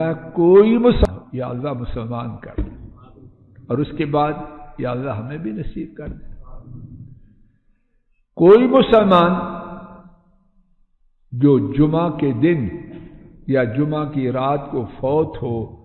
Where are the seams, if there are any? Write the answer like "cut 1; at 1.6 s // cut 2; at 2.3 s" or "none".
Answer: cut 1; at 1.1 s